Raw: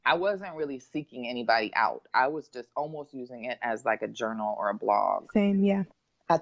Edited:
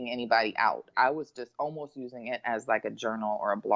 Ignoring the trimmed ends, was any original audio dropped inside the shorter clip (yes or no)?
no